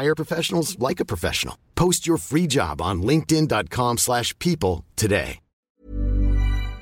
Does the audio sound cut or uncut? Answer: cut